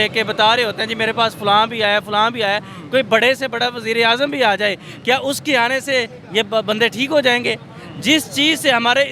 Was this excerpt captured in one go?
yes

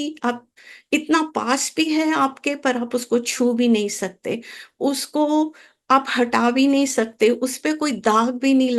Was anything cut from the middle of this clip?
no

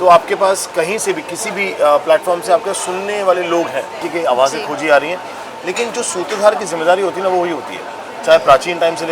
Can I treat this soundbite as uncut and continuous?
no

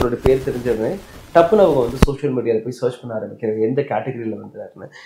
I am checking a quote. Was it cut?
no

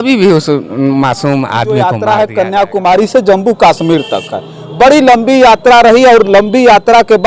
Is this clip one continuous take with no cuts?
no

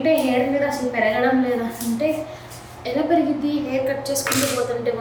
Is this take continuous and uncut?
yes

